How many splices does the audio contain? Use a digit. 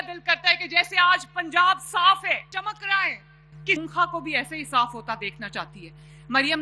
2